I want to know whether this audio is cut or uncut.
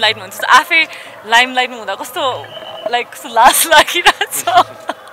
uncut